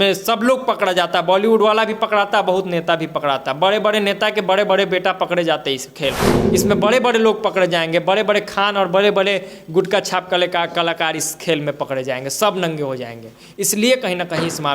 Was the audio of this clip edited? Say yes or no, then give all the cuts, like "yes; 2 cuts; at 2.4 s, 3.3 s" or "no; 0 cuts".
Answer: yes; 1 cut; at 6.3 s